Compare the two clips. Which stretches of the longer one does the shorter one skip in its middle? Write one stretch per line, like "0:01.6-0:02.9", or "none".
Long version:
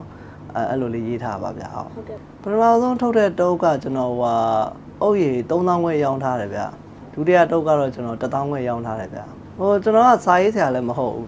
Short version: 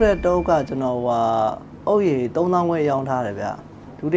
none